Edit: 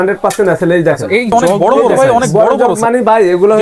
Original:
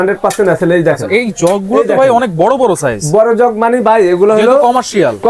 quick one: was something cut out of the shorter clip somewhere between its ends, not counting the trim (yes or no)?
yes